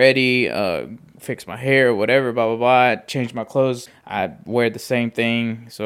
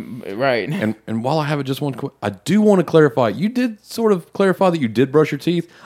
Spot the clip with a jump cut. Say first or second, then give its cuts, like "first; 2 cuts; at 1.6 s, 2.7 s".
first; 1 cut; at 3.9 s